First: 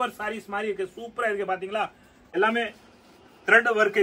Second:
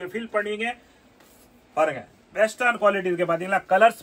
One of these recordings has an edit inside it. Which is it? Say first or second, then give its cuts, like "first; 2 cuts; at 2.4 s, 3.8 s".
first; 1 cut; at 2.1 s